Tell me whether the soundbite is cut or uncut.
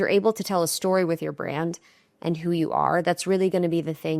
uncut